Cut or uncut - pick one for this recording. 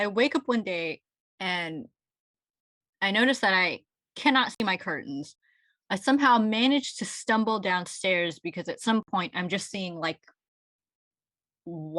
uncut